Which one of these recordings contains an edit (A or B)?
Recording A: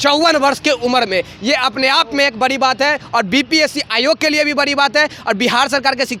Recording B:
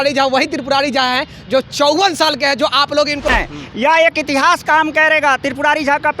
B